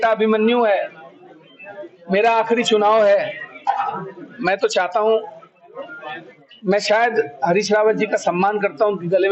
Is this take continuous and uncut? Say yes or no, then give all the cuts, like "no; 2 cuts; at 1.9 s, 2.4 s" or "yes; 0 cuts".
yes; 0 cuts